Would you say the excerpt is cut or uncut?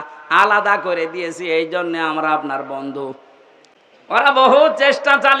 cut